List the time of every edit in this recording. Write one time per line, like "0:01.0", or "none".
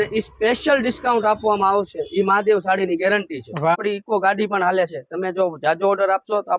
0:03.7